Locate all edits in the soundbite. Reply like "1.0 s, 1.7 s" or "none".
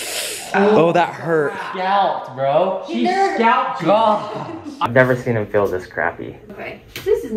4.7 s